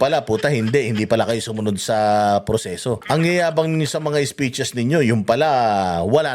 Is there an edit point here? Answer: yes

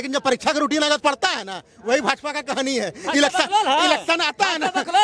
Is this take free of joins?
yes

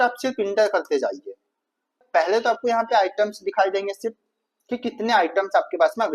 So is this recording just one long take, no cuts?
no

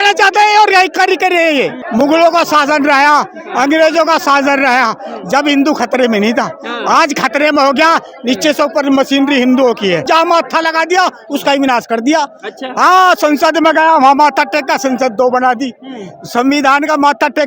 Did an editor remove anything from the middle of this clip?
yes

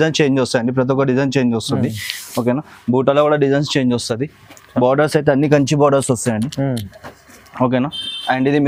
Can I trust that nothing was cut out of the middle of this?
yes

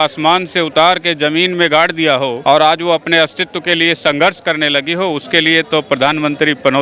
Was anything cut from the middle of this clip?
no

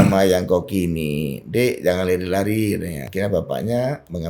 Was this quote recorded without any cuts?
no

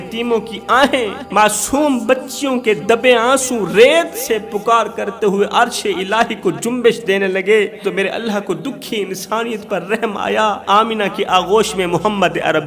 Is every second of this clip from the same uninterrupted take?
no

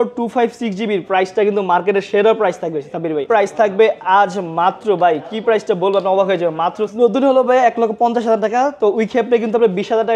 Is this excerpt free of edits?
no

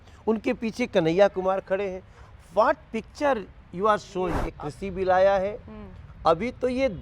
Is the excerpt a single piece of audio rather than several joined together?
no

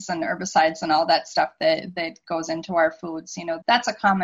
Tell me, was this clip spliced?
no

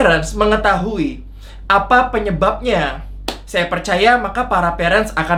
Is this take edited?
no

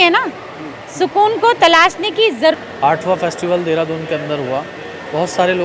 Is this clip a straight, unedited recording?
no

